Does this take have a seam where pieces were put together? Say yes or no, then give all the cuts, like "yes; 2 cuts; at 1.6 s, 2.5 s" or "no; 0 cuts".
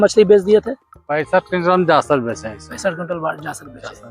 no; 0 cuts